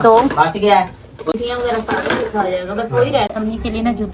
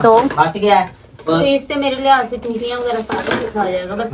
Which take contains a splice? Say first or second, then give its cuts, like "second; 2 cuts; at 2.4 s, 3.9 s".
first; 2 cuts; at 1.3 s, 3.3 s